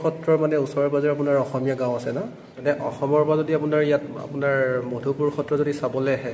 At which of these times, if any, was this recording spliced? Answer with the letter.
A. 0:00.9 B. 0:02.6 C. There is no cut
B